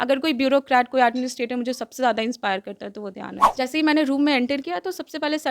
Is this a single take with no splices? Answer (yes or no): no